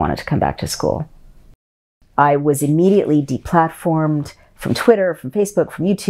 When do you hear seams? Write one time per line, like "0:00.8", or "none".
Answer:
0:02.0